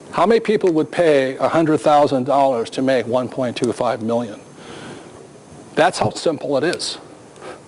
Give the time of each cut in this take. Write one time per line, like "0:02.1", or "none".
0:04.9